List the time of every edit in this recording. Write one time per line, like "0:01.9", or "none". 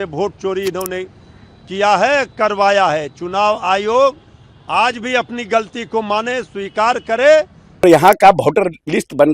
0:07.8